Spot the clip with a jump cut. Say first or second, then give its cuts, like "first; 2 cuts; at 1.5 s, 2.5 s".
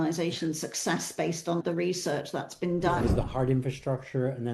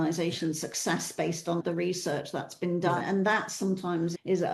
first; 1 cut; at 3.1 s